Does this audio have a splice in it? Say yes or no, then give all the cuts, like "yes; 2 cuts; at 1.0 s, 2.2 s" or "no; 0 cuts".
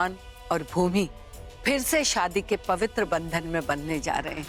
no; 0 cuts